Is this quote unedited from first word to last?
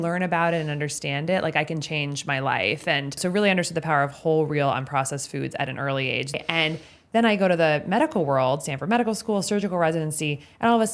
no; 2 cuts; at 3.2 s, 6.3 s

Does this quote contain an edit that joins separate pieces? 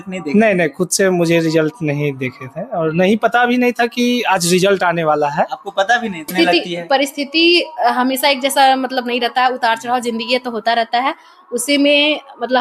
yes; 1 cut; at 6.3 s

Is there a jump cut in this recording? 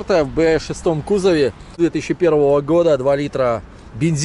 yes; 1 cut; at 1.8 s

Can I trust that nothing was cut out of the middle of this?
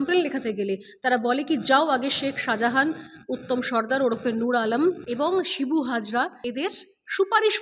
no; 2 cuts; at 5.0 s, 6.4 s

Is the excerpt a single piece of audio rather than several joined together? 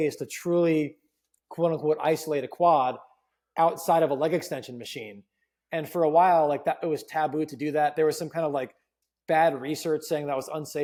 yes; 0 cuts

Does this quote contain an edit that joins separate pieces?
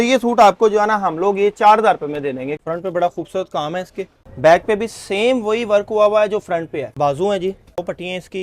yes; 4 cuts; at 2.5 s, 4.2 s, 6.9 s, 7.8 s

